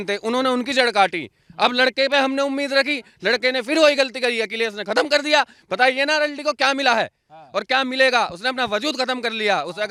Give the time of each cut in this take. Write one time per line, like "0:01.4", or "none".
none

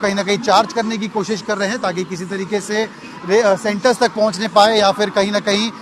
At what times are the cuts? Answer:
none

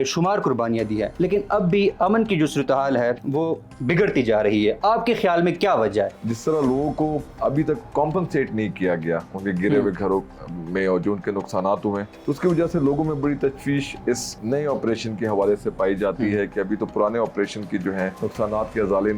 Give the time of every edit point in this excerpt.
0:01.1
0:03.2
0:06.2
0:07.3
0:12.1
0:14.4
0:18.1

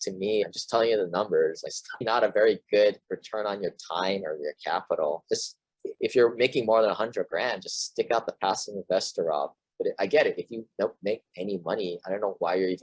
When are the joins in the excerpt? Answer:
0:02.1

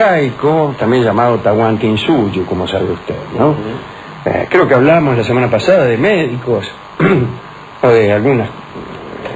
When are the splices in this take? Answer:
none

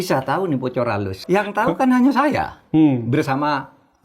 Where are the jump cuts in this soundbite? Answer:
0:01.1

